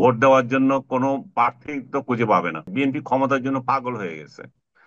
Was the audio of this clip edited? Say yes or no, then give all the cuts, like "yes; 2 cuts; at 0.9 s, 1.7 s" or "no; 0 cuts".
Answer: yes; 1 cut; at 2.6 s